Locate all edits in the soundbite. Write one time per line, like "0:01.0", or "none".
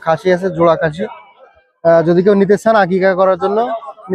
none